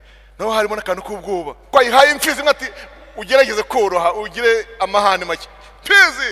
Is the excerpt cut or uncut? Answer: cut